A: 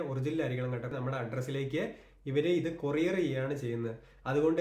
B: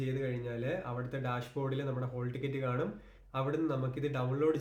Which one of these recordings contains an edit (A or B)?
A